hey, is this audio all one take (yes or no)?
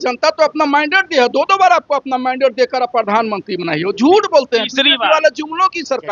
yes